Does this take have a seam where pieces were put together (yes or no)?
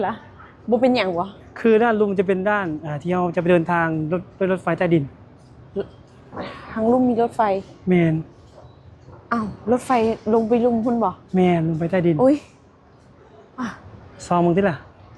no